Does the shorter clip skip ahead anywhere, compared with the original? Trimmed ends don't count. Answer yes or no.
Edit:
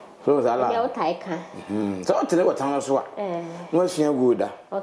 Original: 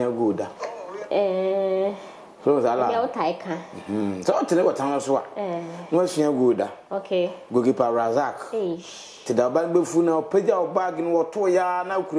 no